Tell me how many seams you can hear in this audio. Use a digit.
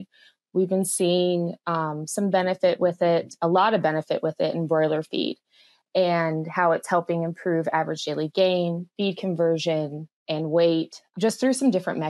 1